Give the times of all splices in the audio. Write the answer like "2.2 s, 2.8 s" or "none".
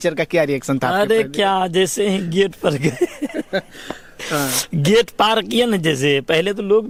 none